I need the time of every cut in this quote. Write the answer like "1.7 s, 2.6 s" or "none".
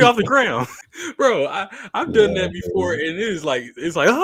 none